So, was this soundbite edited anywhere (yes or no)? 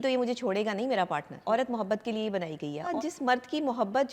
yes